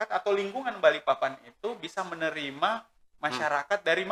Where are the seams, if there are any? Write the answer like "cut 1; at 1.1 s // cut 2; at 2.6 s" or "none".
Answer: none